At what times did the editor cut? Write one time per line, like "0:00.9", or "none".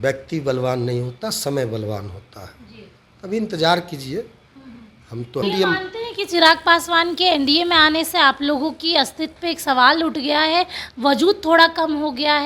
0:05.4